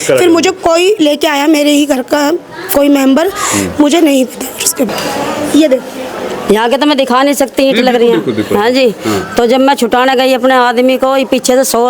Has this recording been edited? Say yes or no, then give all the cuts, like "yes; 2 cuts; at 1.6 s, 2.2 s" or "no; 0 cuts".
yes; 1 cut; at 4.9 s